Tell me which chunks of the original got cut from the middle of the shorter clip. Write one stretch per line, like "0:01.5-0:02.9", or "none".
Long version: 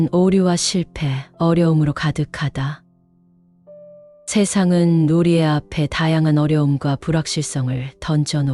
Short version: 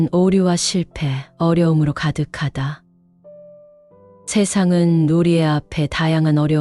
none